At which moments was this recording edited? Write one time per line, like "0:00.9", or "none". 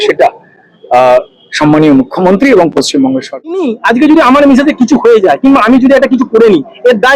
0:03.7